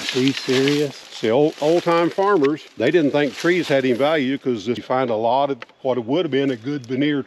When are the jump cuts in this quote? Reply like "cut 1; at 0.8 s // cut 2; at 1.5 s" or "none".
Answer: cut 1; at 1.0 s // cut 2; at 2.7 s // cut 3; at 4.8 s